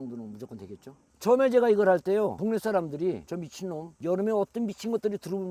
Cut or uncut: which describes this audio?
uncut